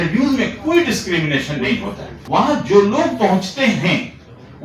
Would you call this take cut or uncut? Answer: cut